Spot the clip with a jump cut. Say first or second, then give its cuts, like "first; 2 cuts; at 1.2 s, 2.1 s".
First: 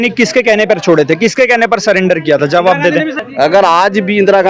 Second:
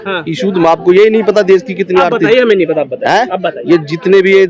first; 1 cut; at 3.2 s